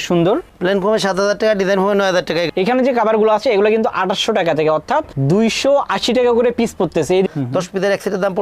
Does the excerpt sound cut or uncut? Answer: cut